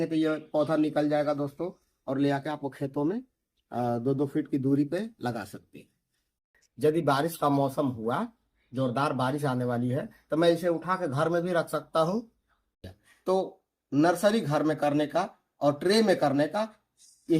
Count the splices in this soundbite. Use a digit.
2